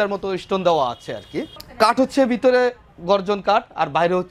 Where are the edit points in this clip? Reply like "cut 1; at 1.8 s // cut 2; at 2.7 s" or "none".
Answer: cut 1; at 1.6 s